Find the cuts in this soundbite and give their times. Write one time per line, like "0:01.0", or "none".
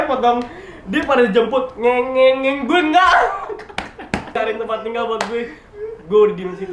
0:04.4